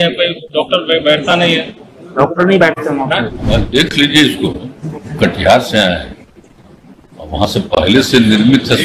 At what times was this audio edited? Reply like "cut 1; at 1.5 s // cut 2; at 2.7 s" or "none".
cut 1; at 3.4 s